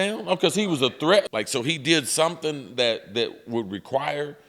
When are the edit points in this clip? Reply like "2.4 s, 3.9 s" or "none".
1.3 s